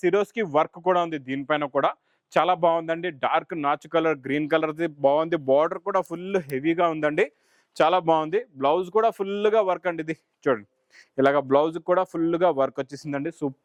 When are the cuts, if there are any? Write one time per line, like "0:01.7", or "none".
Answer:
none